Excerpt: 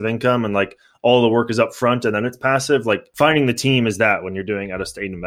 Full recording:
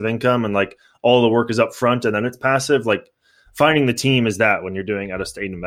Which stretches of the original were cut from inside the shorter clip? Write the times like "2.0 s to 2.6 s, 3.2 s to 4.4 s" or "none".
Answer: 3.1 s to 3.5 s